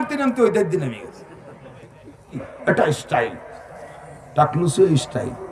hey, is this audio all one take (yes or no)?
no